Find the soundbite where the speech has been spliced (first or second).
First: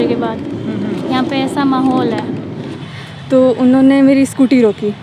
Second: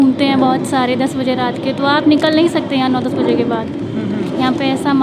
first